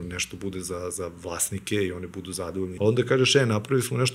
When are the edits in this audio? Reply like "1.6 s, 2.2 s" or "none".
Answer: 2.7 s